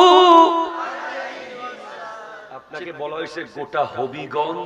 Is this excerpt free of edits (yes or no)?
no